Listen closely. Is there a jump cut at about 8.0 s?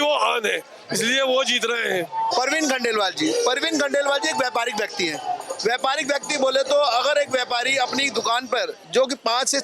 no; 1 cut; at 2.3 s

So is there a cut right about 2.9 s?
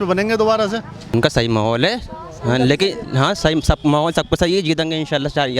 no; 1 cut; at 1.1 s

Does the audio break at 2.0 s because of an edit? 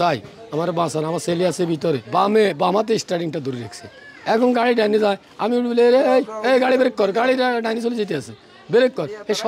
yes; 1 cut; at 2.0 s

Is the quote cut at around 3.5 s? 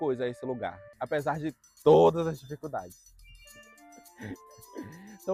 no; 0 cuts

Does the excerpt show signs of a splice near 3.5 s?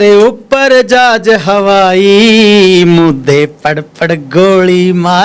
no; 0 cuts

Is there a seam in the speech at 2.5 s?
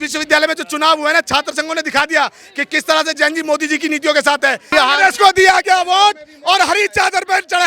no; 1 cut; at 4.6 s

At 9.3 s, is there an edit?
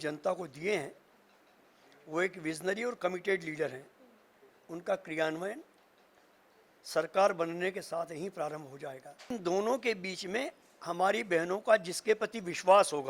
yes; 1 cut; at 9.3 s

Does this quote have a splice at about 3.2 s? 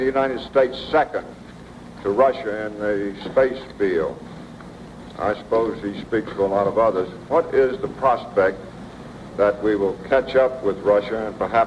yes; 1 cut; at 3.2 s

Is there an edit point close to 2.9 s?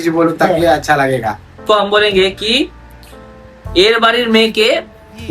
no; 1 cut; at 1.6 s

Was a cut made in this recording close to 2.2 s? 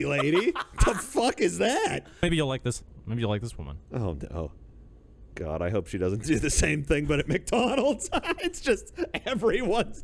yes; 1 cut; at 2.2 s

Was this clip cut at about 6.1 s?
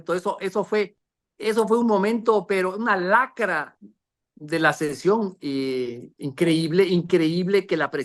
no; 0 cuts

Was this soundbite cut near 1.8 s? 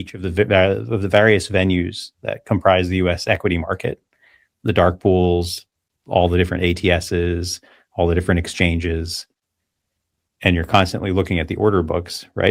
no; 0 cuts

